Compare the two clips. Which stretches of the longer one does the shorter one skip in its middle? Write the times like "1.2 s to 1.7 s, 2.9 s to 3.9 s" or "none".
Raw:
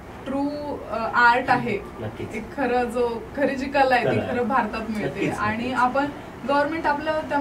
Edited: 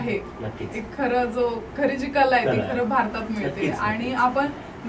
none